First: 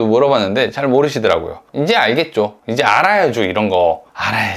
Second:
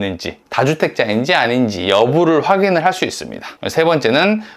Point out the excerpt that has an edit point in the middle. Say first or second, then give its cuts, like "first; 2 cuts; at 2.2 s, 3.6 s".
first; 1 cut; at 1.7 s